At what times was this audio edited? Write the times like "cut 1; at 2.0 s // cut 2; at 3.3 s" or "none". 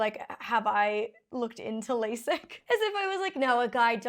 cut 1; at 2.5 s